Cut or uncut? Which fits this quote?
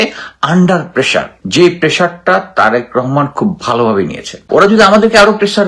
cut